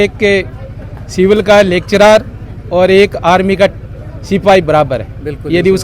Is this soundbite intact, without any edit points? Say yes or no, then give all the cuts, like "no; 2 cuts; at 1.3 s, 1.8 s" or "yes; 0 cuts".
yes; 0 cuts